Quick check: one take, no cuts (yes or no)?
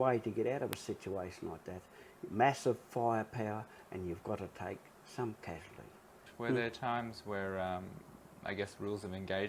no